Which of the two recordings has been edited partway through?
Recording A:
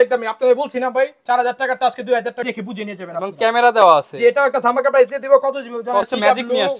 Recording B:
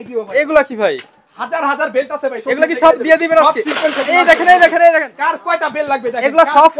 A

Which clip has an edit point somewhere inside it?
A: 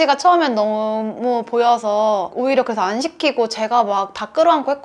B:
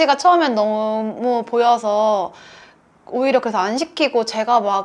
A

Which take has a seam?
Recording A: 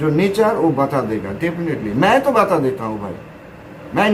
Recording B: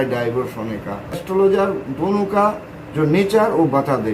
B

